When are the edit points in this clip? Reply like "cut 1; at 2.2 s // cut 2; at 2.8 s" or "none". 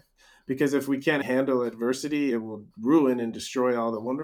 cut 1; at 1.2 s // cut 2; at 2.3 s

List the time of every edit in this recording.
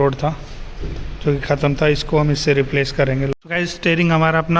cut 1; at 3.3 s

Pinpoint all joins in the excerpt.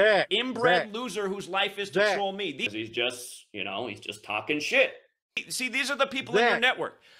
none

